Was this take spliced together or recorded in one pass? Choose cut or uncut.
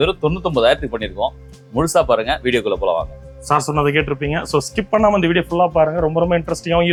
uncut